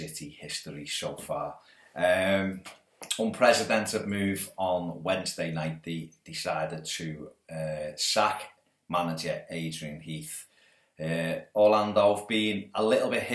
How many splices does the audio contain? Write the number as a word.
one